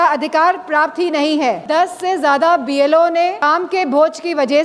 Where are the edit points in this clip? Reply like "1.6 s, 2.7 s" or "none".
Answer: 1.6 s, 3.4 s